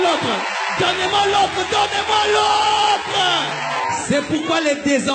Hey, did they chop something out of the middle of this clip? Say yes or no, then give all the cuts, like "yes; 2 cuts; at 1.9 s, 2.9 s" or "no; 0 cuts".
yes; 1 cut; at 3.8 s